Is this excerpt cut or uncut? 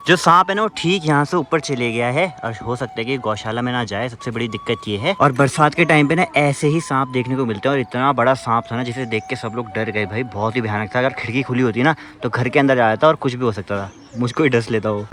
uncut